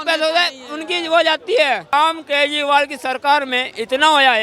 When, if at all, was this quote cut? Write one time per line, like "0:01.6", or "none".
0:01.9